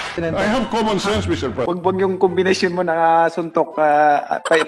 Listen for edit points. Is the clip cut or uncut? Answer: cut